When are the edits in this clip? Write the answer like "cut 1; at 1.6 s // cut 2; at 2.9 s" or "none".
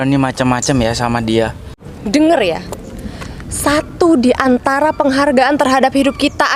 cut 1; at 1.7 s